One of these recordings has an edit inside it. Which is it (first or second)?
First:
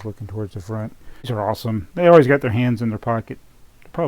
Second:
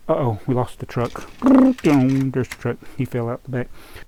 first